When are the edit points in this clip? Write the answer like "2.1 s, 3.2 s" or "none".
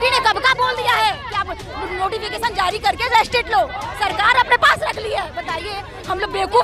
none